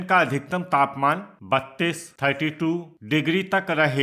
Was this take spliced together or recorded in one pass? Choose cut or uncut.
uncut